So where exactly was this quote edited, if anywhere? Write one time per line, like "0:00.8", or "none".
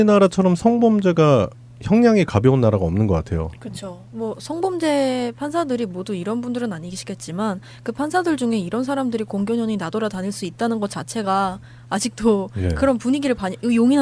0:03.8